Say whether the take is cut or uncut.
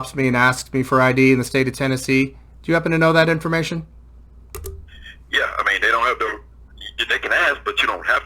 uncut